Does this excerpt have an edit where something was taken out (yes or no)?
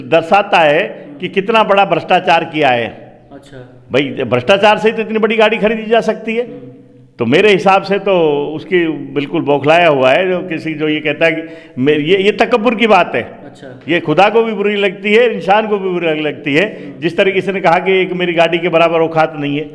no